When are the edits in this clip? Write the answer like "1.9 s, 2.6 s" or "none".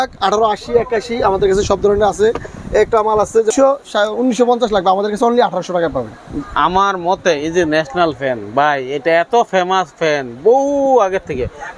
3.5 s